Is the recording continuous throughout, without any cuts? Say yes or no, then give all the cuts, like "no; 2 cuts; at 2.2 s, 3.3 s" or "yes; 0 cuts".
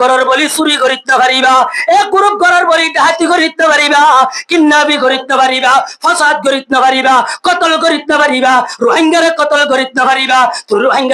yes; 0 cuts